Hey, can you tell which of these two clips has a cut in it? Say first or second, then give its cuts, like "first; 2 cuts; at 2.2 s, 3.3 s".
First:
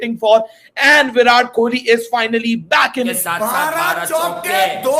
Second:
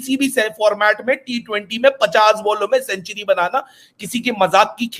first; 1 cut; at 3.2 s